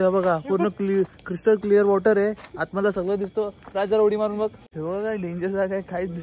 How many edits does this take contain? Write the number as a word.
one